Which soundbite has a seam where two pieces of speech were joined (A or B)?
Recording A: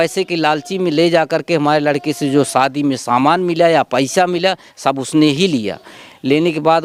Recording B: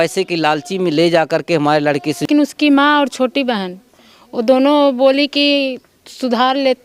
B